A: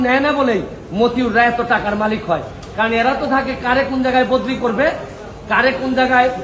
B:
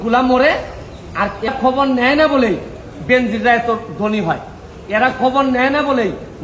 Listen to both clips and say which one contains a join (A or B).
B